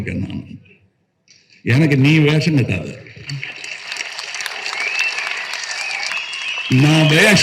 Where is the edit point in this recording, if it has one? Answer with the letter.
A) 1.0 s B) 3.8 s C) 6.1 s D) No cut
C